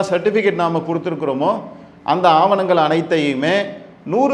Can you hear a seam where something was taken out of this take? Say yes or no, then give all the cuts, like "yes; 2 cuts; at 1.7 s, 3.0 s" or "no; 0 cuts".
no; 0 cuts